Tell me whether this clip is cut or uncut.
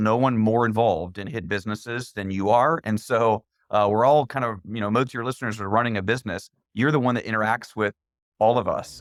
uncut